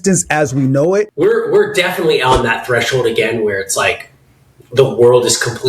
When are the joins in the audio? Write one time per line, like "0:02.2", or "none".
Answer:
0:01.1